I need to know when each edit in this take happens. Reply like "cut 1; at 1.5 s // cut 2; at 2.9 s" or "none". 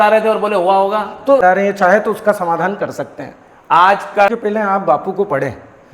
cut 1; at 1.4 s // cut 2; at 4.3 s